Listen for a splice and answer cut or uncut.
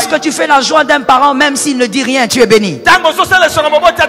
uncut